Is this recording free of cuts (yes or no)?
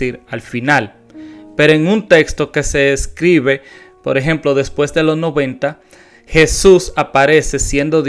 yes